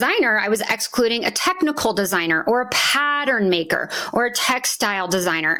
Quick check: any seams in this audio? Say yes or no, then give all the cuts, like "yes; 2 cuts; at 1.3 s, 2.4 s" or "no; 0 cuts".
no; 0 cuts